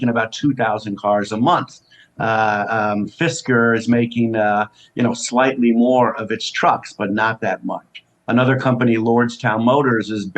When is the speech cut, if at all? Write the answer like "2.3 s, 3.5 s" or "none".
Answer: none